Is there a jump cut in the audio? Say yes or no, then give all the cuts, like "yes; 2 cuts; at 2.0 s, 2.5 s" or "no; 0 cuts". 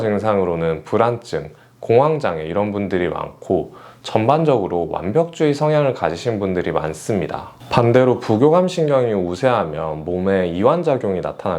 no; 0 cuts